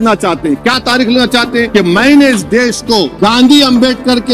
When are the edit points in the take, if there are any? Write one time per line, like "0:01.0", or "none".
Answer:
0:01.7
0:03.1